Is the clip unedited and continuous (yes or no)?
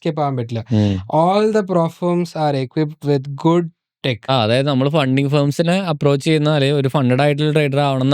no